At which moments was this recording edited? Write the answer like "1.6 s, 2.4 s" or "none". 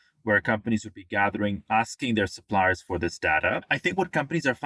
3.7 s